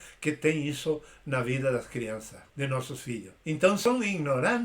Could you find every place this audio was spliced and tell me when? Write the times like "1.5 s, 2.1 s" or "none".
2.4 s, 3.8 s